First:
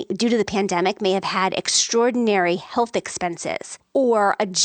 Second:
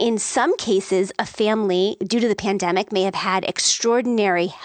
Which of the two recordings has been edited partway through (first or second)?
first